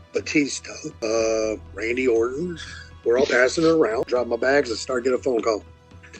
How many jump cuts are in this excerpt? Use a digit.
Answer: 1